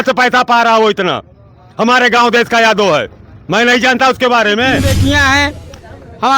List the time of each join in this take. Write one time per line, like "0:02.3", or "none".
0:04.8